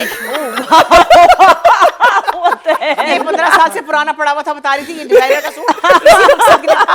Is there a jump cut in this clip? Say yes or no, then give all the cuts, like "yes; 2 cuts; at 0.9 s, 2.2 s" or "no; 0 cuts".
no; 0 cuts